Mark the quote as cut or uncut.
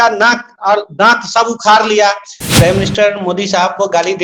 cut